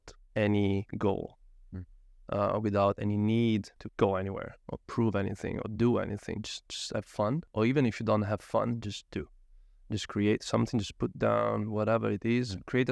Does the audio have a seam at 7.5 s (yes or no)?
yes